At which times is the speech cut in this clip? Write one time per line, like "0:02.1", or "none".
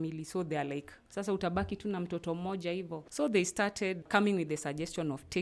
0:03.0
0:04.0